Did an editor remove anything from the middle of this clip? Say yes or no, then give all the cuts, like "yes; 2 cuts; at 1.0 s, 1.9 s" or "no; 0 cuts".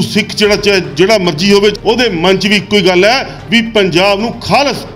yes; 1 cut; at 1.7 s